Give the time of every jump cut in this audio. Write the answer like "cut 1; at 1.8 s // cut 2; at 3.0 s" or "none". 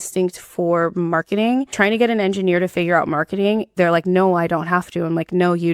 cut 1; at 1.7 s // cut 2; at 3.7 s